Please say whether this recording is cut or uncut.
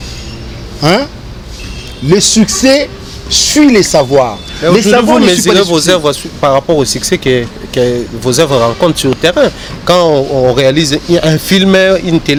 uncut